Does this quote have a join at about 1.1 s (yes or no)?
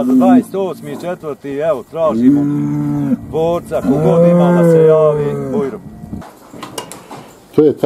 no